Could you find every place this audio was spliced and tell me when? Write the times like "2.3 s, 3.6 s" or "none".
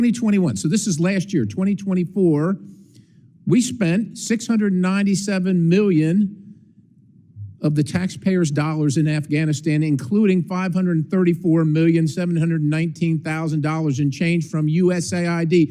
none